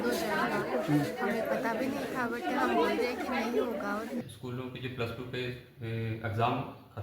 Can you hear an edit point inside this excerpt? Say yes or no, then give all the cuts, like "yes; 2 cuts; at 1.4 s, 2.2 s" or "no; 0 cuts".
yes; 1 cut; at 4.2 s